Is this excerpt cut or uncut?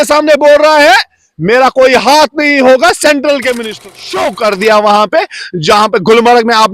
cut